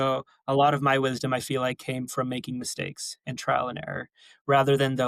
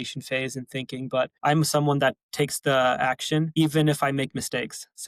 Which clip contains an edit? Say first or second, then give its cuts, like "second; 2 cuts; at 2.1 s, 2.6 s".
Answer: second; 3 cuts; at 1.3 s, 2.2 s, 3.5 s